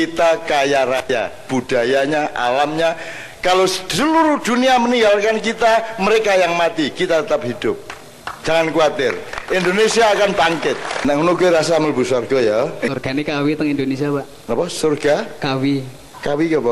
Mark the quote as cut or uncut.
cut